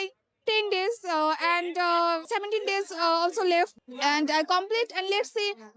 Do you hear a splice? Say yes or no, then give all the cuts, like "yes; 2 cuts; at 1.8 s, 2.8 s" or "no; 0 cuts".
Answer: yes; 2 cuts; at 2.2 s, 3.8 s